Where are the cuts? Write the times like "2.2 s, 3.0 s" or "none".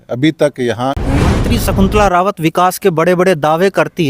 1.3 s